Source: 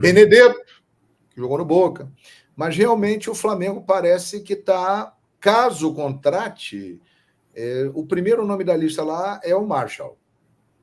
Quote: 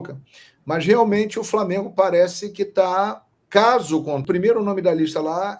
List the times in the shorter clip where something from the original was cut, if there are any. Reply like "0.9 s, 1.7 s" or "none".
4.2 s